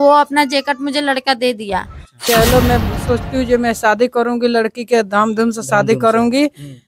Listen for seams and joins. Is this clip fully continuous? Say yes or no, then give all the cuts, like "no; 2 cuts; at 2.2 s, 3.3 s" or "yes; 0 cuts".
no; 1 cut; at 2.2 s